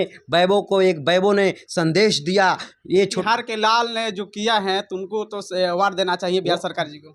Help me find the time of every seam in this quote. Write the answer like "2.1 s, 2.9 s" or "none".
3.2 s